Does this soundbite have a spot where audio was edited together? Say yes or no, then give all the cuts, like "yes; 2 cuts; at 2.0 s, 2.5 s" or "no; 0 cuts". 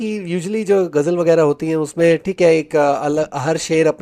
no; 0 cuts